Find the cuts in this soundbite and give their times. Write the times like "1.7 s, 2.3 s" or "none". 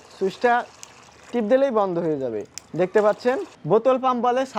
none